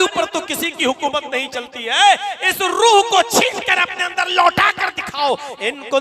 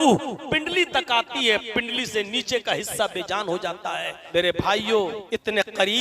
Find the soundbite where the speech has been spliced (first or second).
second